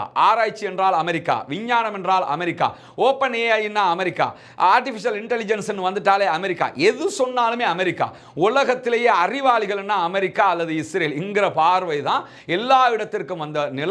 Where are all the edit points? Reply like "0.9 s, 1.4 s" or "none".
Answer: none